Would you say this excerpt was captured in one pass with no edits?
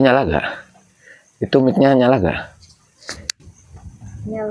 yes; 0 cuts

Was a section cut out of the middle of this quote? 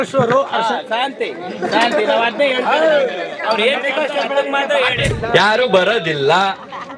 yes; 1 cut; at 5.1 s

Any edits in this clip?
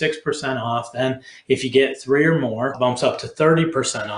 yes; 1 cut; at 2.8 s

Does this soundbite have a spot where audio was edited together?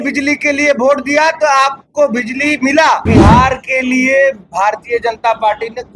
yes; 1 cut; at 3.0 s

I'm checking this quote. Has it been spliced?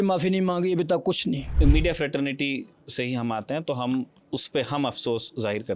yes; 1 cut; at 1.6 s

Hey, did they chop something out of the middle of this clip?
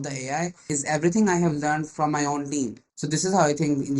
yes; 1 cut; at 2.8 s

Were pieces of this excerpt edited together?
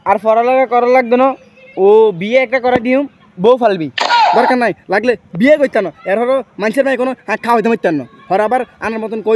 yes; 1 cut; at 3.9 s

